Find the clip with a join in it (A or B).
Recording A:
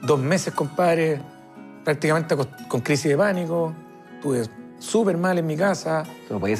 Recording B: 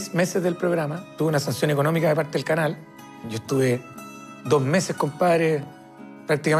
B